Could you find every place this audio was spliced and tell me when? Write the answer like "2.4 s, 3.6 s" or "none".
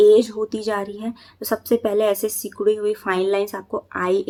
none